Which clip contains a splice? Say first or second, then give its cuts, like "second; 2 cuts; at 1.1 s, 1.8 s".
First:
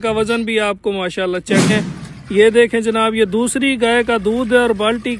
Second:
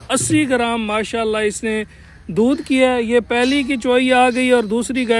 first; 1 cut; at 1.7 s